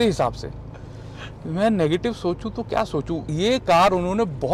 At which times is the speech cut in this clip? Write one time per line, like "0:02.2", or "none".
0:03.2